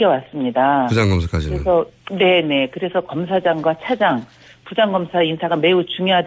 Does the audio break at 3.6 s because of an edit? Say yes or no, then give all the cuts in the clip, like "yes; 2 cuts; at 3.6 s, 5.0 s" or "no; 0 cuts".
no; 0 cuts